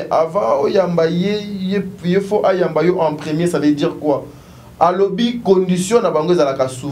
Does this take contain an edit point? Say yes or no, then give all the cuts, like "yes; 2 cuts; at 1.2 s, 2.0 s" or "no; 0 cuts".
no; 0 cuts